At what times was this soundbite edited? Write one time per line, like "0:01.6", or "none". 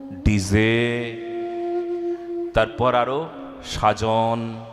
none